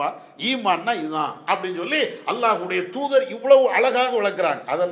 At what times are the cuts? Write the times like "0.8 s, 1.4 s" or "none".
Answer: none